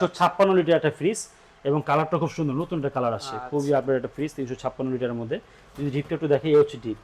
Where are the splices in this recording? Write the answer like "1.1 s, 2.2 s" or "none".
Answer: none

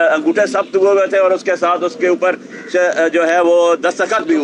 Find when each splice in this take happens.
none

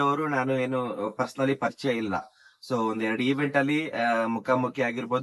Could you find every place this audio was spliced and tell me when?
none

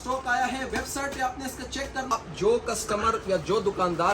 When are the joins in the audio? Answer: 2.1 s

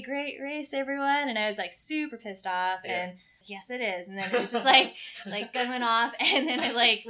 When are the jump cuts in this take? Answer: 3.4 s

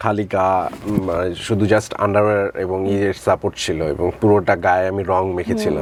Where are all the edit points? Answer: none

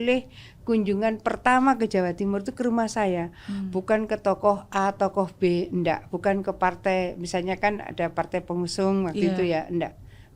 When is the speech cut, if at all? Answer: none

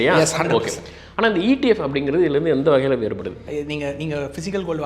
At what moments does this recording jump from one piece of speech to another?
3.3 s

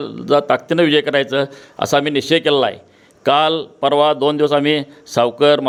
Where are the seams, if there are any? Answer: none

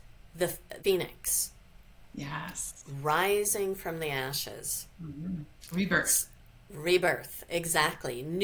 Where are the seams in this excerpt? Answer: none

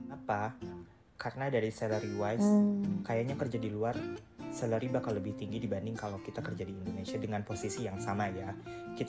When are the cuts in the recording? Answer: none

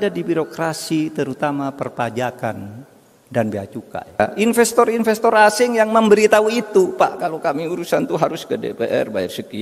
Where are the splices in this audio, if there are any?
4.2 s

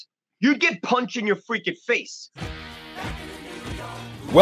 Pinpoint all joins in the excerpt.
2.2 s

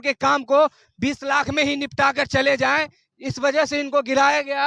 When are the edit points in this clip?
none

